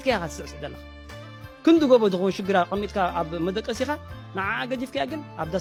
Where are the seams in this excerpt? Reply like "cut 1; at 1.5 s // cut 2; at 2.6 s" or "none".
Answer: none